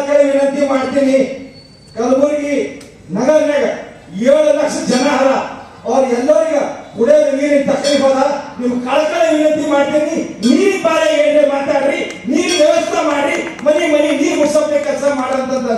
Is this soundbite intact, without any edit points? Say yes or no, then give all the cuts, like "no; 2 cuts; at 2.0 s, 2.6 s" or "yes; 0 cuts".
yes; 0 cuts